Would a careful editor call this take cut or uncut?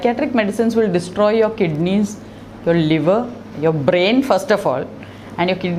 uncut